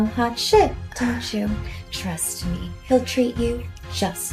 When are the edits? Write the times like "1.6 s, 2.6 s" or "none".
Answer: none

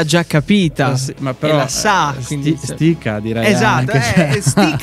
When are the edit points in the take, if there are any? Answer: none

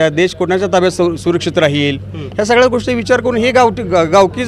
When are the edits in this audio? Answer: none

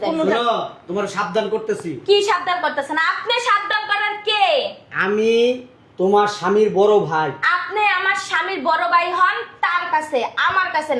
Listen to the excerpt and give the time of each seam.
6.4 s

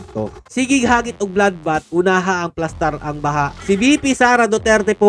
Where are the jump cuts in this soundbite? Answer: 3.6 s

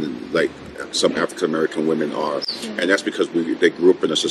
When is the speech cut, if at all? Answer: none

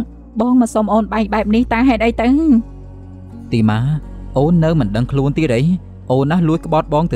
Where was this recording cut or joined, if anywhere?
none

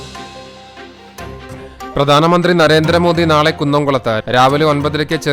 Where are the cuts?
1.7 s

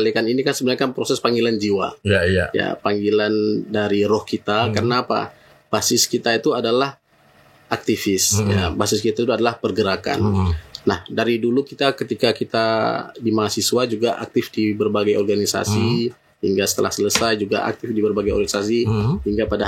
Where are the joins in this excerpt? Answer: none

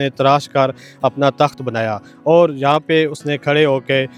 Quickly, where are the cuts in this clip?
none

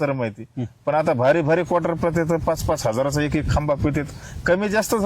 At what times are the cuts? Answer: 1.0 s

